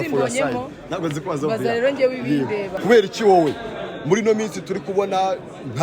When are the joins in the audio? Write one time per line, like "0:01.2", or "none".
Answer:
0:02.7